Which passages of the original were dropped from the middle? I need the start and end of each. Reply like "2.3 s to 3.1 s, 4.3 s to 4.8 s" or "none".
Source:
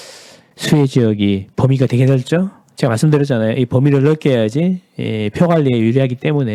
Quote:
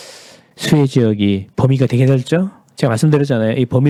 none